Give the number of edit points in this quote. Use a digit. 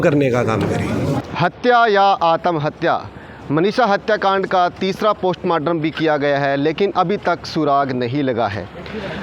1